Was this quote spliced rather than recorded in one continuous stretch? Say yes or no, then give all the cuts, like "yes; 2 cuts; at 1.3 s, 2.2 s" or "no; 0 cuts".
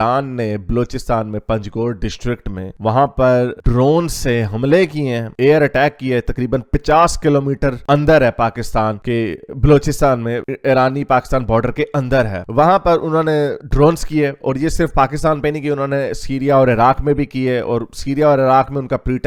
no; 0 cuts